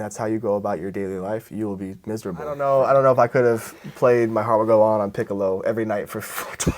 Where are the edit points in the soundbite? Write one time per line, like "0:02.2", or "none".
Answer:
0:02.6

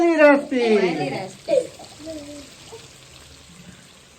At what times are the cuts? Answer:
none

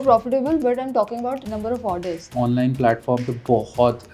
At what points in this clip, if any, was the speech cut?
0:01.4
0:02.3

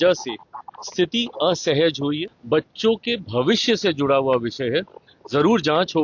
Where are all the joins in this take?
0:02.3

